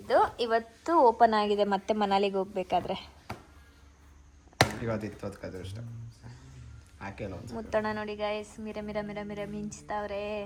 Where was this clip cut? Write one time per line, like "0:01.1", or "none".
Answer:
none